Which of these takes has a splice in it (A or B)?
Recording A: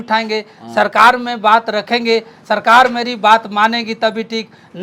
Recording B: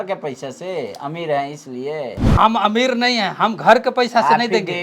B